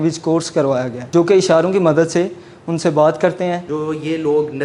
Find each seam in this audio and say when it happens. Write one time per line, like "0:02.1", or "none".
0:01.0
0:03.7

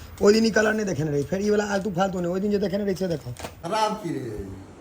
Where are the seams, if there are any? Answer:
0:03.6

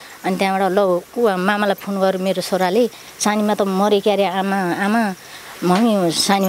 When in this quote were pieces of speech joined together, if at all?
none

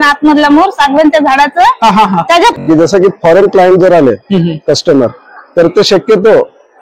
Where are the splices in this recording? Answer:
0:02.6

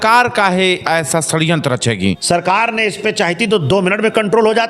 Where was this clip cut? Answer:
0:02.2

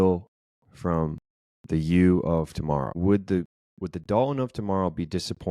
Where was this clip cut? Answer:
0:03.0

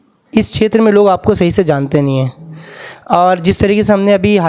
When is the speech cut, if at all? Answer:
none

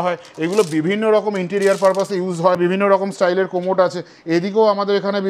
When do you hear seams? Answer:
0:02.6

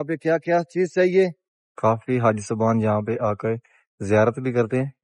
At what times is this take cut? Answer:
0:01.4

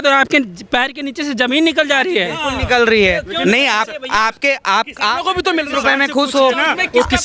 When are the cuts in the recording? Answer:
none

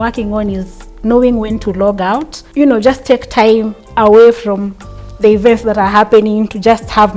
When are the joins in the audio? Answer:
0:02.4

